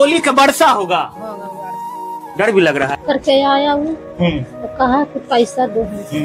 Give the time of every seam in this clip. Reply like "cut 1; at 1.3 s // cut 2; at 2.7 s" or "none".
cut 1; at 3.0 s